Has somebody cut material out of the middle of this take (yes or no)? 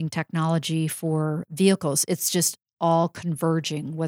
no